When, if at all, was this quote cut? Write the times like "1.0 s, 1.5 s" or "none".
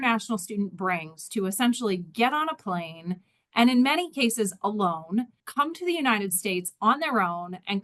5.4 s